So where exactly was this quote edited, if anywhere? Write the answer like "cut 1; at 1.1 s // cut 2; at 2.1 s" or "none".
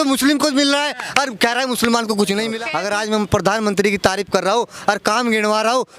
cut 1; at 2.7 s